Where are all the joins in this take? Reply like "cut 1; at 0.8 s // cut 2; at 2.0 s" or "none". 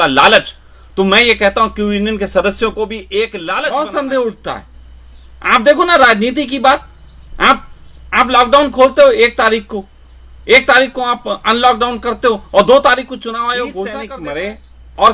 cut 1; at 3.4 s // cut 2; at 14.0 s